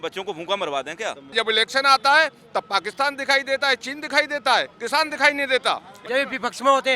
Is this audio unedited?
no; 2 cuts; at 1.3 s, 5.9 s

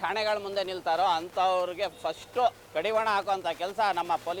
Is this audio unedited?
no; 1 cut; at 2.6 s

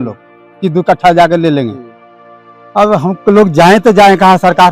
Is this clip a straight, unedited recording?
yes; 0 cuts

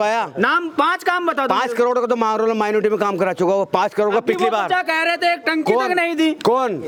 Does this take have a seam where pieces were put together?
no; 0 cuts

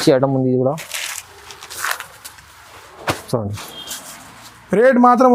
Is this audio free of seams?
yes; 0 cuts

